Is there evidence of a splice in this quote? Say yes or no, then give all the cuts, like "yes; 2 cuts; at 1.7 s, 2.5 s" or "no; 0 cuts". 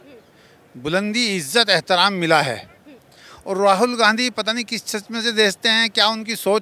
no; 0 cuts